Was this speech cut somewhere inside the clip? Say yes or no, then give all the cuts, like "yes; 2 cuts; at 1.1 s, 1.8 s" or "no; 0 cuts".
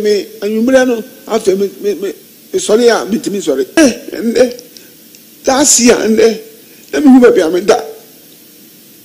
yes; 1 cut; at 3.8 s